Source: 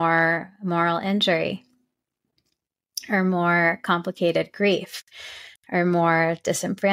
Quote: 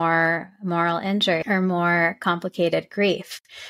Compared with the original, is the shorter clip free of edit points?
no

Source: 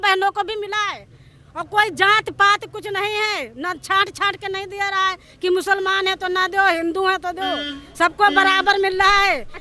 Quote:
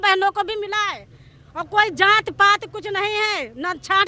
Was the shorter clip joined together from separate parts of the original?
no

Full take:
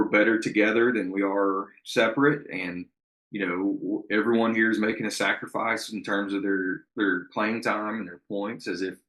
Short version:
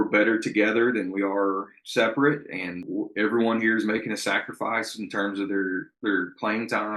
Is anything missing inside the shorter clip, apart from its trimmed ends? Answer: yes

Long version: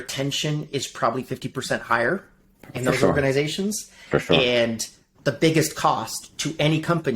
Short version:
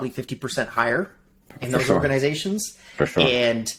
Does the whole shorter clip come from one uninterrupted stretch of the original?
yes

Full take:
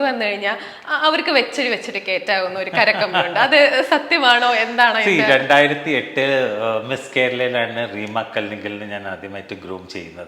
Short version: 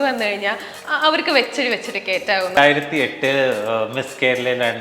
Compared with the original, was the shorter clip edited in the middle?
yes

